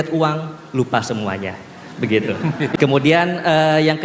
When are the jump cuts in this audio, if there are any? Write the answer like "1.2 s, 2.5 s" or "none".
2.7 s